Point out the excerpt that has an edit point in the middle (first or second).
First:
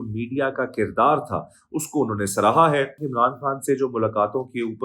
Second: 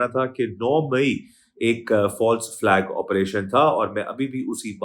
first